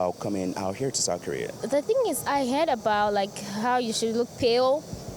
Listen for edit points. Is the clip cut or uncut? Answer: uncut